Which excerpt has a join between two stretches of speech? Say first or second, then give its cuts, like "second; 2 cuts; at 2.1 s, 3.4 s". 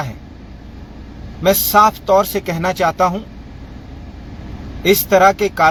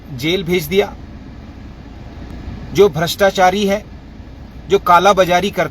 second; 1 cut; at 2.3 s